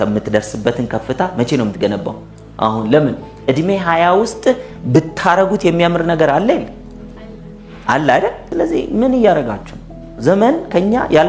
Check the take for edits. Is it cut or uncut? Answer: cut